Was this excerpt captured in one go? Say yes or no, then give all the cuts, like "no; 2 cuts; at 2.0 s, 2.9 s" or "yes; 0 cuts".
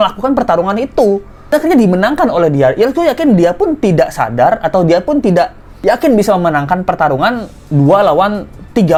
yes; 0 cuts